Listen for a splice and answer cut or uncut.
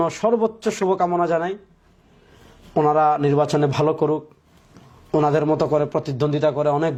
uncut